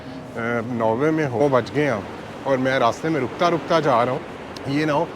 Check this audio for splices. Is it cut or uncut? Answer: cut